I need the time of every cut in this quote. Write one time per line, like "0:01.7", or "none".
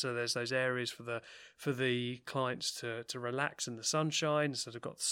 none